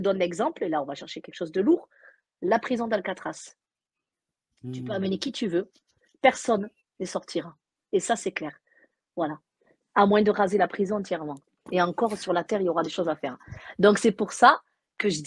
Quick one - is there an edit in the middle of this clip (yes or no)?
no